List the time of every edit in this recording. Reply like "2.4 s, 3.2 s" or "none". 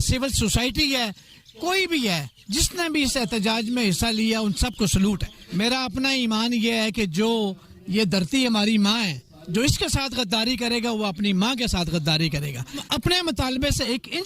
5.4 s, 12.8 s